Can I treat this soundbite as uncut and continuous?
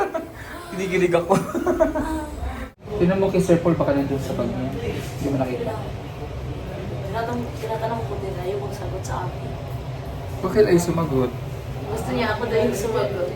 no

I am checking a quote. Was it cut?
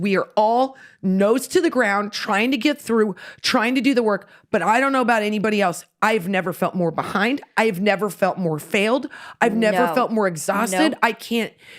no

